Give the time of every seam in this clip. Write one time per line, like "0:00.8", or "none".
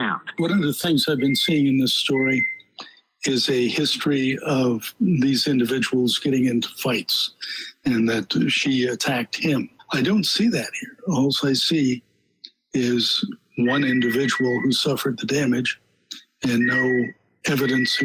none